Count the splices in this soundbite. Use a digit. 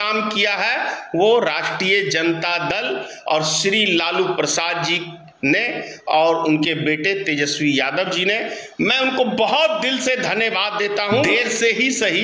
1